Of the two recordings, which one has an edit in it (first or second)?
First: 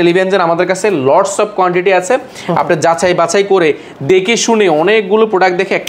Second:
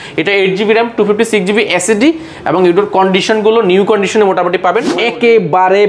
second